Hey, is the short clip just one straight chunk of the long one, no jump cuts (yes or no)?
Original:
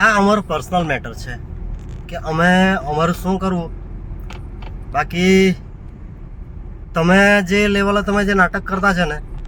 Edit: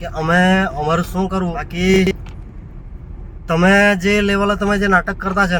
no